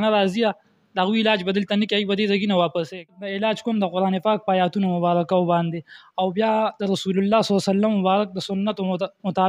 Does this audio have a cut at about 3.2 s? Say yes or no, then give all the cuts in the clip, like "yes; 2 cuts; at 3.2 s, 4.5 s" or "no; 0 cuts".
yes; 1 cut; at 3.2 s